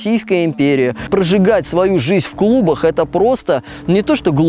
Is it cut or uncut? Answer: cut